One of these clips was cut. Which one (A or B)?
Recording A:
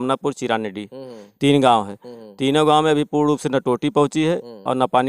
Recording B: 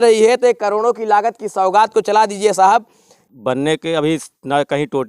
B